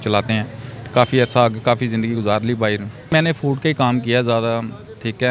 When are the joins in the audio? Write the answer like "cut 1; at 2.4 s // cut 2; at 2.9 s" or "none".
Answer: cut 1; at 3.1 s